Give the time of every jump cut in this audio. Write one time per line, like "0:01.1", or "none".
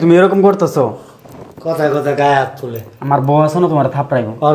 none